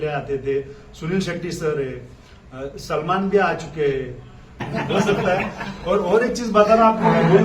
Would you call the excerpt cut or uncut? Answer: cut